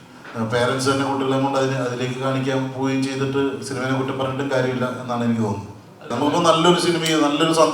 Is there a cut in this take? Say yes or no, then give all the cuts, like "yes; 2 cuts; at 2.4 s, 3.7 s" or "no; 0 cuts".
yes; 1 cut; at 6.1 s